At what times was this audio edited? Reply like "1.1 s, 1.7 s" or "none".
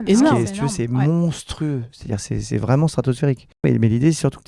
3.6 s